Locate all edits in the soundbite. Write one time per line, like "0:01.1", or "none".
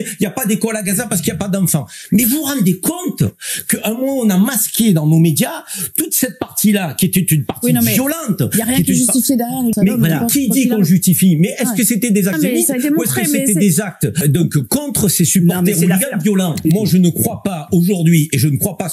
0:09.8
0:12.3
0:14.2
0:16.6